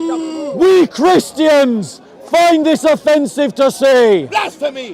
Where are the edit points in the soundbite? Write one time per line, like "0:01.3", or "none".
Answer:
none